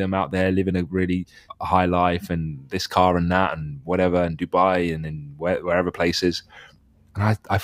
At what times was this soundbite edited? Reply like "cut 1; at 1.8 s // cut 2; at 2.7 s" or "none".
cut 1; at 1.4 s